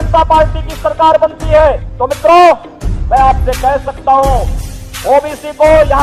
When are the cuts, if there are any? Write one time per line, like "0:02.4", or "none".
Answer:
none